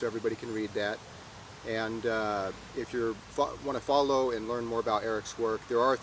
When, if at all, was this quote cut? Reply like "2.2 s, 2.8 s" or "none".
3.2 s